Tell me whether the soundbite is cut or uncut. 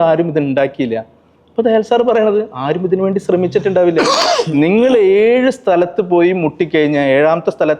uncut